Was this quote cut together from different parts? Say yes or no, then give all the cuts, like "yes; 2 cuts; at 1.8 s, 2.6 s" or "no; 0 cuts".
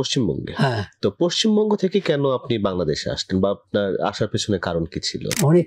no; 0 cuts